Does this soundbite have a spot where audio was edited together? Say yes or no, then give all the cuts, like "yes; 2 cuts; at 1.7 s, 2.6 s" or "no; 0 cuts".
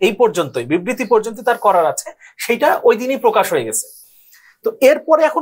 no; 0 cuts